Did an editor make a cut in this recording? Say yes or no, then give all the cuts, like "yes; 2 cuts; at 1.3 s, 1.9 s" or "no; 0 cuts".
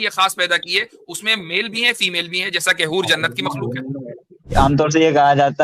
yes; 1 cut; at 4.5 s